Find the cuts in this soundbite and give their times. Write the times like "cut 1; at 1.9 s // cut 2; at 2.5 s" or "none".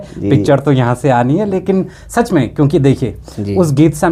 none